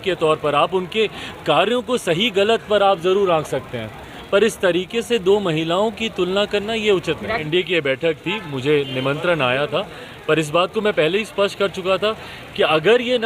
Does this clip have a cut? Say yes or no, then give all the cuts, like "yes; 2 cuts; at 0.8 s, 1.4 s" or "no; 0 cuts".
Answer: yes; 1 cut; at 7.4 s